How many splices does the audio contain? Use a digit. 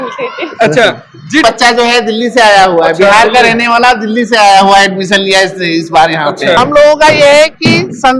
2